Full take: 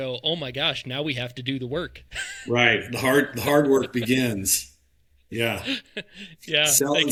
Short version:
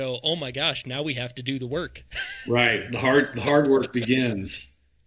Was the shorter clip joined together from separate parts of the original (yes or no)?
no